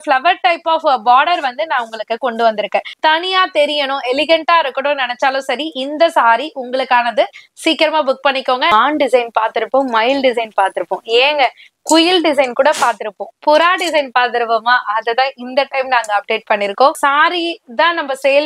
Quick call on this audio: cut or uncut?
cut